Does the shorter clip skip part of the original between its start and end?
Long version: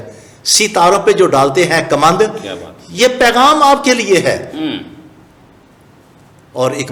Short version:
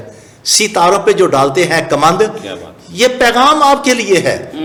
no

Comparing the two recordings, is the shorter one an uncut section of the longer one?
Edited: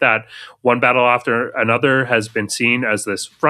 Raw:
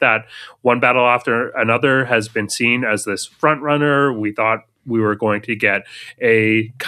yes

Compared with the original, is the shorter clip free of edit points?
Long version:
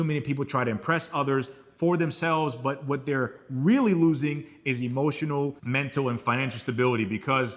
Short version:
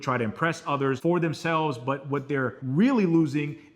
no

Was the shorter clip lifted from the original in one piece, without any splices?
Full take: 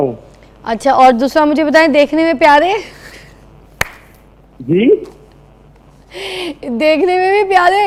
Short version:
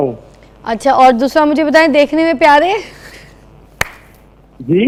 yes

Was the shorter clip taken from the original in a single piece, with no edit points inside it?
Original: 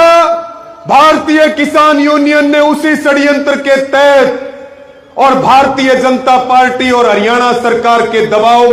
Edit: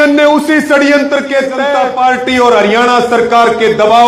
no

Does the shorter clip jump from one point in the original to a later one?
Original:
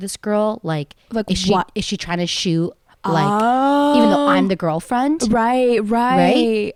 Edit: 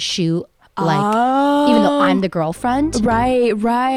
no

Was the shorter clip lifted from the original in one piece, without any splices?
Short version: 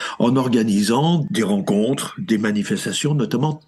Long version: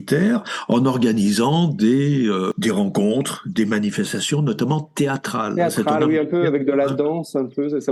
no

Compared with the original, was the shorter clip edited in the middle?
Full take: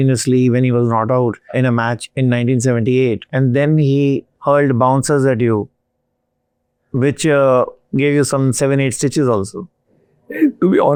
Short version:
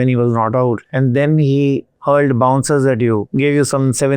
yes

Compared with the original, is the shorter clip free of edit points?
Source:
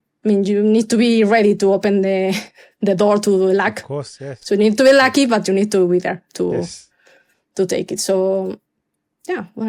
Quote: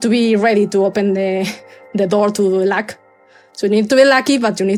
yes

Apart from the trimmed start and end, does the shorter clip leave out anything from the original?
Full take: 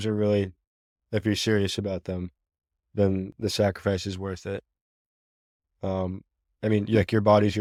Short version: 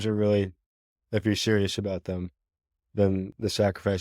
no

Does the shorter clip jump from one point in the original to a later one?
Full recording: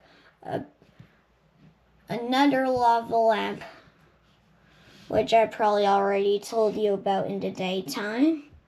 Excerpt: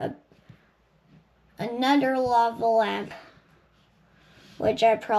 no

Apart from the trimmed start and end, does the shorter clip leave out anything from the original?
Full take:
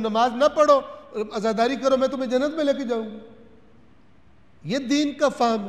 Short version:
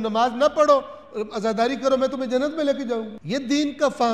yes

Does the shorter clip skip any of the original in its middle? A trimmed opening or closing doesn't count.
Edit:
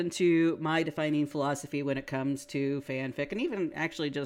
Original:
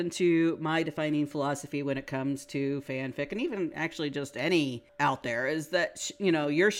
no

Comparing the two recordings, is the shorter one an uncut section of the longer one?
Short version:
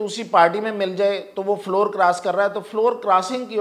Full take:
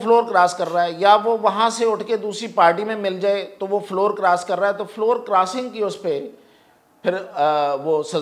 yes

